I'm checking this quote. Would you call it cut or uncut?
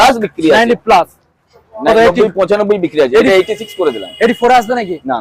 uncut